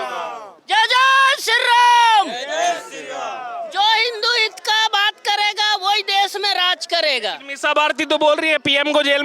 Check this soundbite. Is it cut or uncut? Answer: uncut